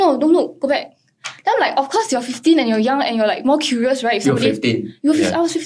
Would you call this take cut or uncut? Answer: uncut